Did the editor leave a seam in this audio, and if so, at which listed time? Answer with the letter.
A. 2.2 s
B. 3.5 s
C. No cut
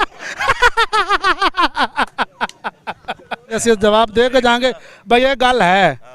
B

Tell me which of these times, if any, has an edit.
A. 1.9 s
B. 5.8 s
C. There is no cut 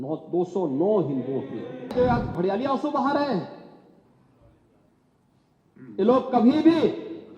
A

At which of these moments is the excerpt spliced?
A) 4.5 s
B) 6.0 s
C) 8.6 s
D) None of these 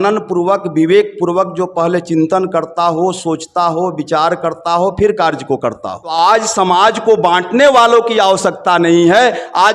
B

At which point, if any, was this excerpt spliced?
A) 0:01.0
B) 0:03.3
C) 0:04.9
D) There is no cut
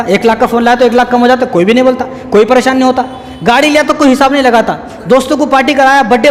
D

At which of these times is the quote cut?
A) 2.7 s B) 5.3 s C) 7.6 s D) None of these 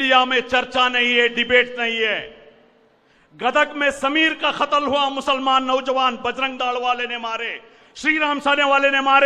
D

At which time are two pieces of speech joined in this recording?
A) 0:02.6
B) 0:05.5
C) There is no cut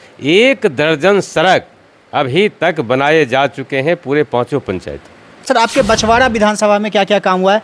B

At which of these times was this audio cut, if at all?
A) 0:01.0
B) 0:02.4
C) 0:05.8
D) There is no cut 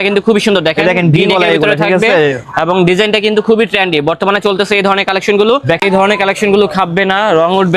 C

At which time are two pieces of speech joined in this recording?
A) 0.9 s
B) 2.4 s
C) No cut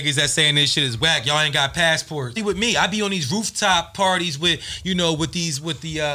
B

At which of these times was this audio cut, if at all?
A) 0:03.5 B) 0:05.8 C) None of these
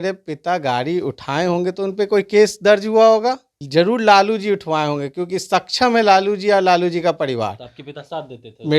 A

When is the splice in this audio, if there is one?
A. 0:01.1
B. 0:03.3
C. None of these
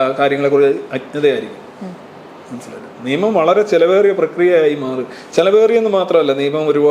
C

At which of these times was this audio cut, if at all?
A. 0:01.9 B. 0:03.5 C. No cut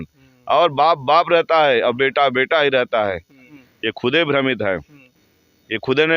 B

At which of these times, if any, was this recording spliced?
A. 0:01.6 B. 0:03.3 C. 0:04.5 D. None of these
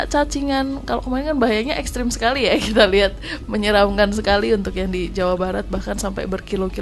D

